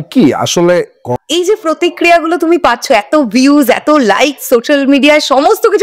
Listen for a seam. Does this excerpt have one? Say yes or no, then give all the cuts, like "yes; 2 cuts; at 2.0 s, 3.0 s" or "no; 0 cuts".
yes; 1 cut; at 1.1 s